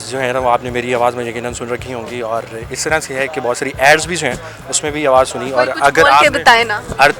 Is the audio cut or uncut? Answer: uncut